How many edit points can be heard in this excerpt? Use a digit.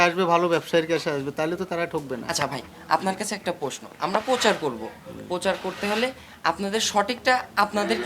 0